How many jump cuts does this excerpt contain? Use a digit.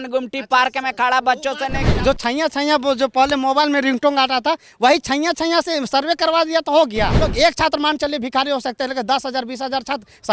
2